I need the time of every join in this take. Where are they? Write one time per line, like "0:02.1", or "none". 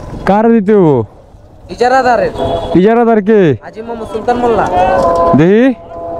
none